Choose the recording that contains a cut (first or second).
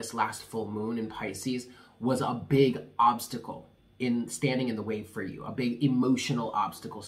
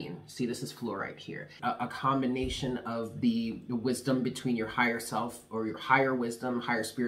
second